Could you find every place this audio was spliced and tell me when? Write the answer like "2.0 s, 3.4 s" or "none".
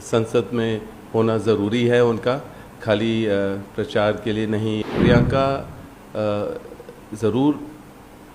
4.8 s